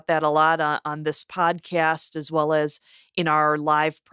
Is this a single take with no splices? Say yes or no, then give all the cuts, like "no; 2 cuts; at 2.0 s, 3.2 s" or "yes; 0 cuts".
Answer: yes; 0 cuts